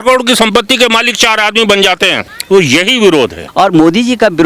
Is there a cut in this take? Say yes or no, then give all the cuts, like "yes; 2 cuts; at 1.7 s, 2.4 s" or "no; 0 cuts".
yes; 2 cuts; at 2.3 s, 3.4 s